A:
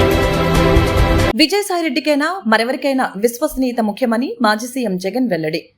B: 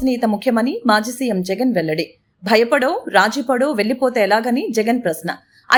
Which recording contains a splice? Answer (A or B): A